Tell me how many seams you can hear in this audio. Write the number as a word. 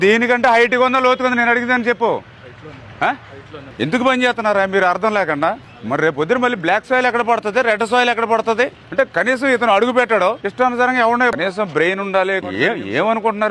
two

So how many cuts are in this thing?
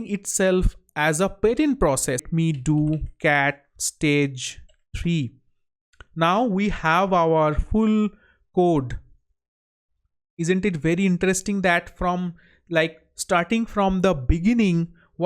one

